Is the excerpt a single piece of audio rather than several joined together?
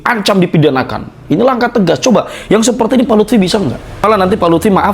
no; 1 cut; at 4.0 s

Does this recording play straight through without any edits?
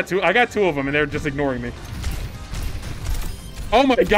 no; 1 cut; at 1.8 s

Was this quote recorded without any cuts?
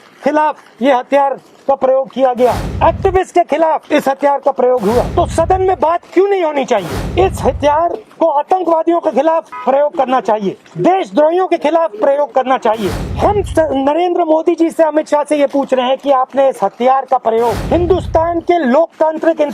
no; 9 cuts; at 2.7 s, 3.8 s, 5.1 s, 7.0 s, 8.0 s, 9.5 s, 10.7 s, 13.0 s, 17.6 s

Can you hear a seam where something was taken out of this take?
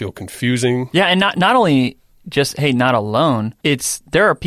yes; 2 cuts; at 0.9 s, 3.5 s

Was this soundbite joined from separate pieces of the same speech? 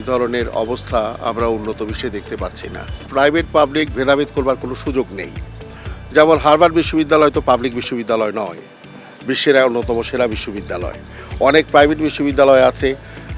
yes; 1 cut; at 3.0 s

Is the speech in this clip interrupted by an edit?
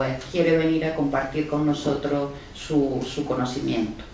no; 0 cuts

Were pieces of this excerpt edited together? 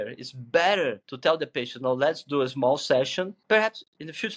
yes; 2 cuts; at 1.1 s, 3.4 s

